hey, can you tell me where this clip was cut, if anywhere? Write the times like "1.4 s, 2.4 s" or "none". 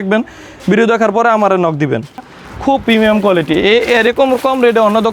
2.4 s